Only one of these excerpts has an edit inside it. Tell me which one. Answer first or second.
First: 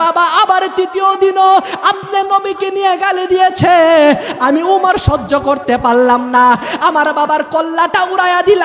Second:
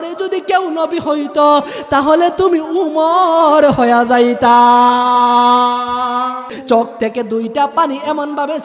second